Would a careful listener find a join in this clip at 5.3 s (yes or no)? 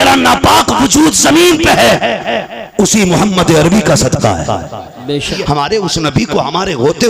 yes